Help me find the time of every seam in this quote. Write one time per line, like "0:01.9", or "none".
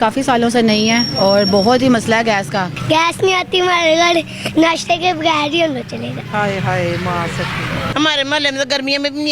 0:01.1
0:02.7
0:07.9